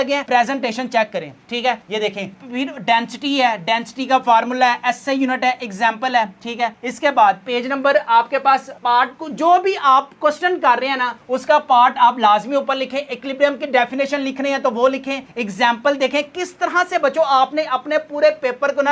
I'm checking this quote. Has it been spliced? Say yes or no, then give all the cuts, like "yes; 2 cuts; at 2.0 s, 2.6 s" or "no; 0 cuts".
no; 0 cuts